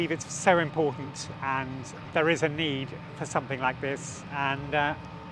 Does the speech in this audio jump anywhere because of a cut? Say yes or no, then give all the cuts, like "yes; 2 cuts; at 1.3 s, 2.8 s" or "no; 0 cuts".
yes; 1 cut; at 1.3 s